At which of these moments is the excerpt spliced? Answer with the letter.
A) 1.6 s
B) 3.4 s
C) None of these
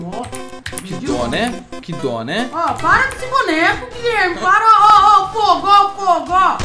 C